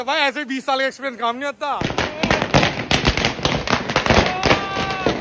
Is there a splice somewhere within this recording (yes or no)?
yes